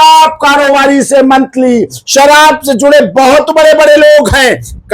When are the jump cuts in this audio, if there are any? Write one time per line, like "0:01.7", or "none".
none